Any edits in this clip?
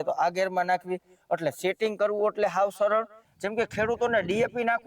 yes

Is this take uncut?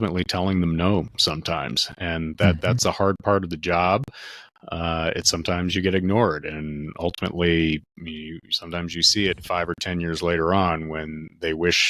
yes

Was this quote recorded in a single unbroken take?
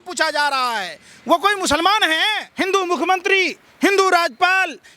no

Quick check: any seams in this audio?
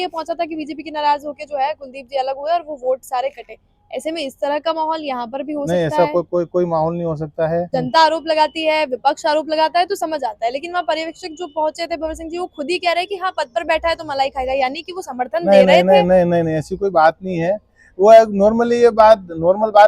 yes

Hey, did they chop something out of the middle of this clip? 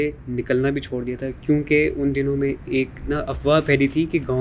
no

